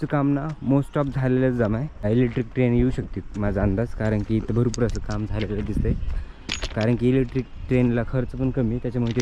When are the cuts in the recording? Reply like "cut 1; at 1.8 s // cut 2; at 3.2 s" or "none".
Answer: cut 1; at 1.9 s